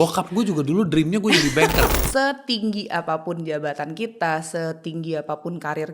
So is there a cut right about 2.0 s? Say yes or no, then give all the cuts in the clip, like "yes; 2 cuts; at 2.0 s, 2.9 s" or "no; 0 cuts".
yes; 1 cut; at 2.0 s